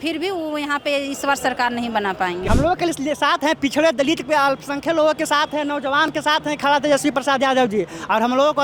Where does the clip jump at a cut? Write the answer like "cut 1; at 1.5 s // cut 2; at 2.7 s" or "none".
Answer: cut 1; at 2.4 s

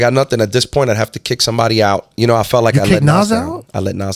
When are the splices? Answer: cut 1; at 2.1 s

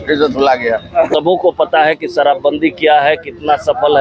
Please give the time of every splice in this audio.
cut 1; at 1.1 s

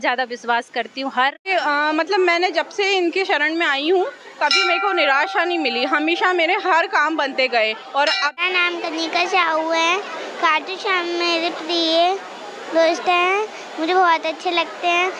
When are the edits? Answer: cut 1; at 1.5 s // cut 2; at 8.3 s

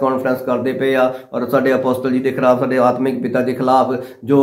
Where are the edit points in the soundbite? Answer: none

